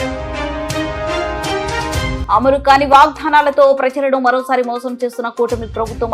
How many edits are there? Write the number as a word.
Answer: one